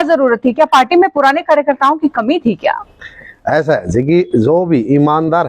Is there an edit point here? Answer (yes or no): no